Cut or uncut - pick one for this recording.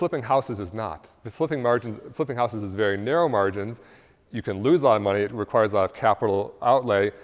uncut